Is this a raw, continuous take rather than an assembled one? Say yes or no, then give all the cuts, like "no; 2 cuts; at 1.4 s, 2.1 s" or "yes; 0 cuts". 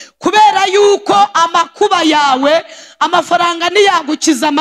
yes; 0 cuts